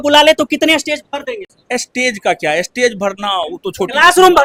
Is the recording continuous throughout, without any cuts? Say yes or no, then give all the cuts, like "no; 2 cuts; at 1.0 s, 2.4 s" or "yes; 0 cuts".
yes; 0 cuts